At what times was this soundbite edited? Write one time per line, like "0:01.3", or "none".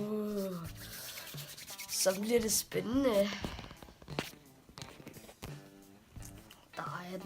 0:04.5